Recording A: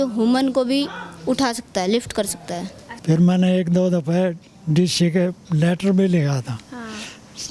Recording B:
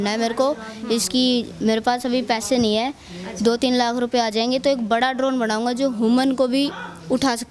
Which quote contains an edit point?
A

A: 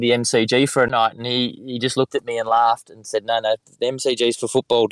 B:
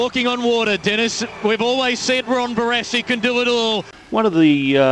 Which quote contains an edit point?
B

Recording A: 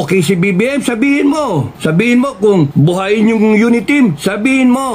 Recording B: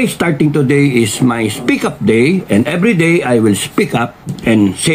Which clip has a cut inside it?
A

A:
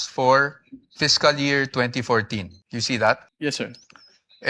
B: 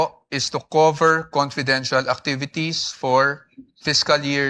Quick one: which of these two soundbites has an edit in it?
A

